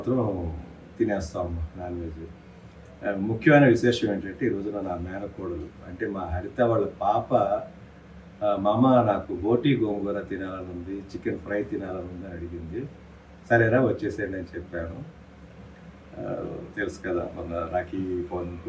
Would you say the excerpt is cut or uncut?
uncut